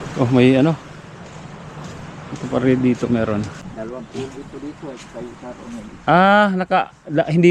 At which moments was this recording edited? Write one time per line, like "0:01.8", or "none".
0:03.6